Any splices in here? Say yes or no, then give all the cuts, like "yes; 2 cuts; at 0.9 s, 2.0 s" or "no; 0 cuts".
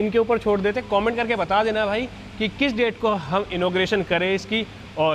no; 0 cuts